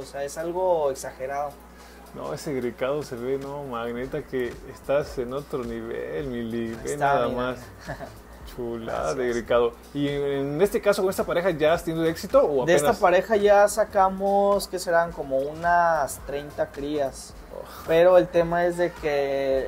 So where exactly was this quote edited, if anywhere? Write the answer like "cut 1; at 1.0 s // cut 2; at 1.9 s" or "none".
none